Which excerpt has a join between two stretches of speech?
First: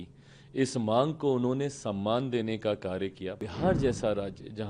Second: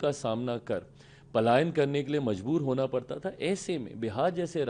first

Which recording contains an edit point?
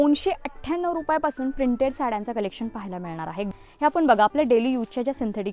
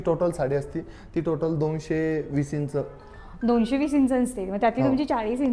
first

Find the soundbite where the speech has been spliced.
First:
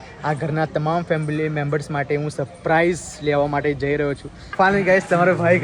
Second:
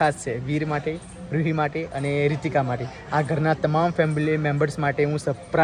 first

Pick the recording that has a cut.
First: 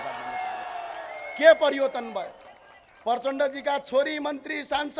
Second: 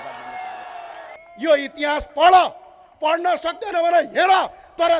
second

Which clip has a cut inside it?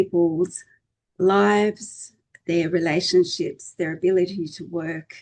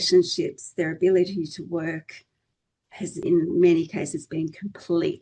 second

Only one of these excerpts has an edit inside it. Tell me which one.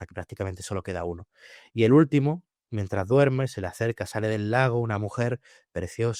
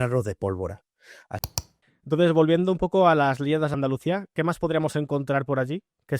second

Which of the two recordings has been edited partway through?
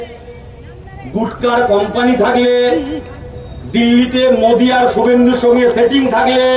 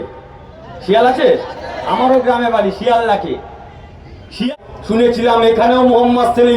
second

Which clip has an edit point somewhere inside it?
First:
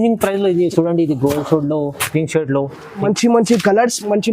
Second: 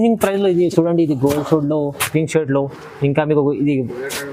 first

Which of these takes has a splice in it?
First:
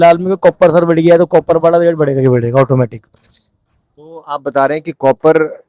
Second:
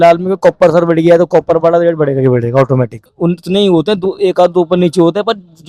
second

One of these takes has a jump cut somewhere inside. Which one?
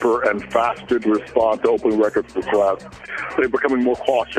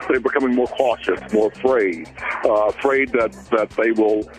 first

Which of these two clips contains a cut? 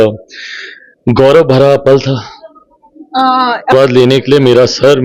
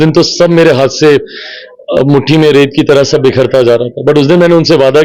first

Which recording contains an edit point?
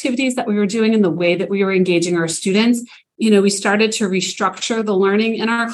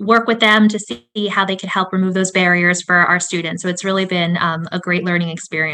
first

